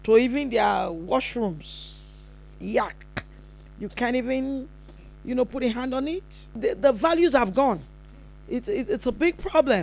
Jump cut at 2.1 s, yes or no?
no